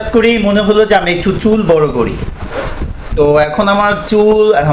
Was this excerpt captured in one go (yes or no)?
yes